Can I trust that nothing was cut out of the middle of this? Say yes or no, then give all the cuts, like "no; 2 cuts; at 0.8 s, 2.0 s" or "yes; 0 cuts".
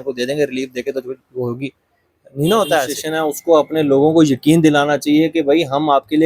no; 1 cut; at 3.0 s